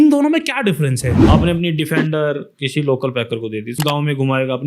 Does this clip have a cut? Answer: yes; 3 cuts; at 1.1 s, 2.5 s, 3.8 s

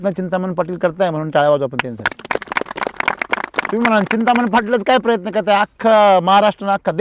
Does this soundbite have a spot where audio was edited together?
no; 0 cuts

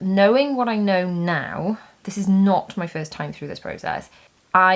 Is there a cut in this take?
no; 0 cuts

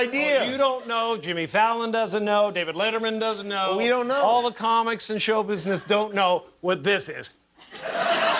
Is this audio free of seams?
yes; 0 cuts

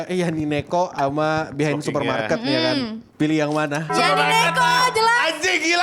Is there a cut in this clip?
yes; 2 cuts; at 3.0 s, 3.9 s

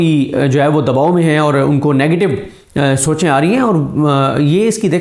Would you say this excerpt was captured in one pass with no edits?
yes; 0 cuts

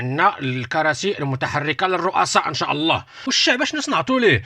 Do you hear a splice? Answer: yes; 1 cut; at 3.3 s

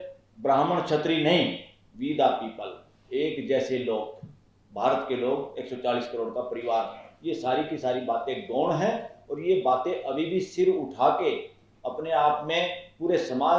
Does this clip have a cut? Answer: no; 0 cuts

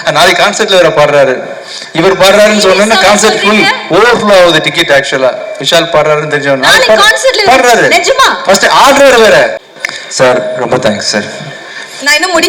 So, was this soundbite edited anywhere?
yes; 1 cut; at 9.6 s

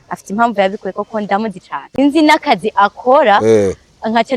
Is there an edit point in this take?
yes; 1 cut; at 1.8 s

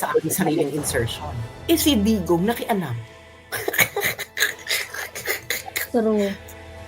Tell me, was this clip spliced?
yes; 2 cuts; at 1.5 s, 5.9 s

